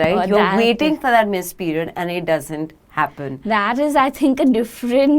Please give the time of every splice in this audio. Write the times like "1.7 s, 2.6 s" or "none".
none